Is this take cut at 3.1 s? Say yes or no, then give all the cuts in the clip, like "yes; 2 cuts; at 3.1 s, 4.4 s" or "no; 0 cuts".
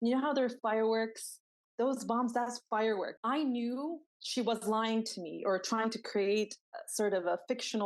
yes; 1 cut; at 3.1 s